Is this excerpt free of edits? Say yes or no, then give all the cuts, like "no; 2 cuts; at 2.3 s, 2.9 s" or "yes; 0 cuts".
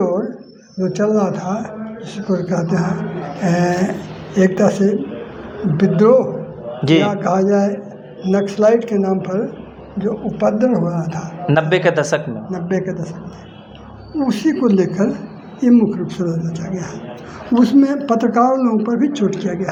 yes; 0 cuts